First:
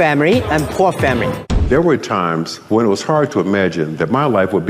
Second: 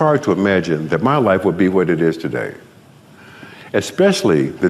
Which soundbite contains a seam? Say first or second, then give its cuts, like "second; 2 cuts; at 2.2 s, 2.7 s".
first; 1 cut; at 1.6 s